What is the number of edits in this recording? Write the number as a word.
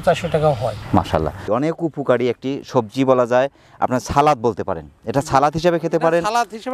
one